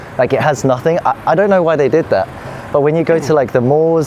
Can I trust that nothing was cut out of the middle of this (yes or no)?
yes